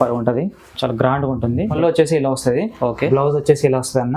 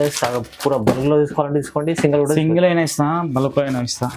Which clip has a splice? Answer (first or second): first